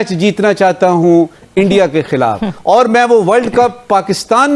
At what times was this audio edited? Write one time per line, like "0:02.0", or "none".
none